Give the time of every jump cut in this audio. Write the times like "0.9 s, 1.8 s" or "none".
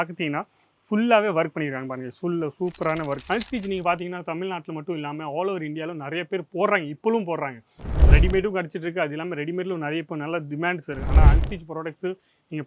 3.2 s